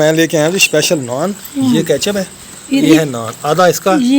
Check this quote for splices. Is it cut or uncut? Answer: cut